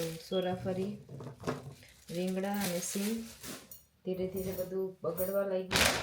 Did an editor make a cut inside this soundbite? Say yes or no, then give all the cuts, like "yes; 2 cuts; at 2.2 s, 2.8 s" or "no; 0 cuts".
no; 0 cuts